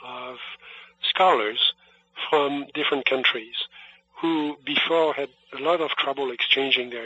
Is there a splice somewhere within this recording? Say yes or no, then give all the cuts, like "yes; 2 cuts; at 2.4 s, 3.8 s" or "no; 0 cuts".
no; 0 cuts